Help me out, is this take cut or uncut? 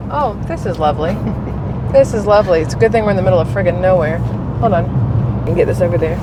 uncut